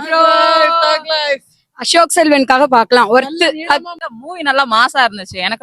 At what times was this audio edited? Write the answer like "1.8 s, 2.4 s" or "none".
4.0 s